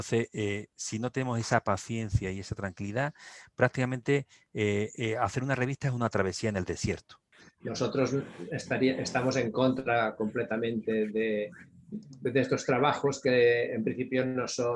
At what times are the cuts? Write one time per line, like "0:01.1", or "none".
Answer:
0:07.3